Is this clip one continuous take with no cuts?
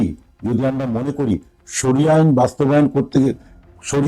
yes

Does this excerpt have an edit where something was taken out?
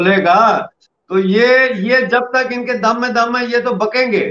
no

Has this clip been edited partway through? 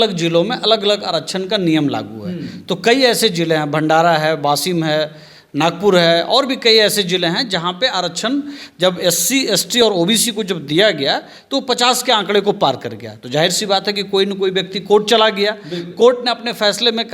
no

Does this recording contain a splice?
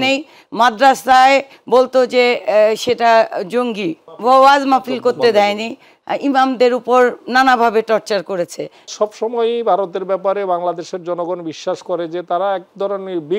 yes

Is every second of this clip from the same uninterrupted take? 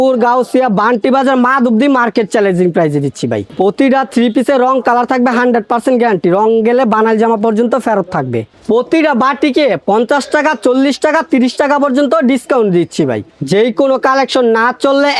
no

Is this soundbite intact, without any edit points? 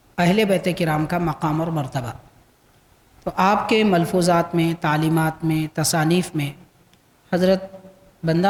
yes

